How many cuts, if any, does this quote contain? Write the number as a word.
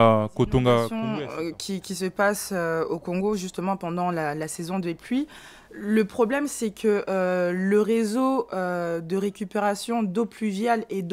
one